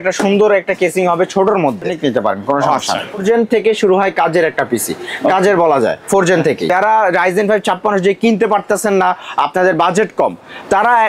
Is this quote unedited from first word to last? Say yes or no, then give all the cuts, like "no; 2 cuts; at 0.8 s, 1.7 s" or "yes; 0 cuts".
no; 3 cuts; at 1.9 s, 3.2 s, 6.7 s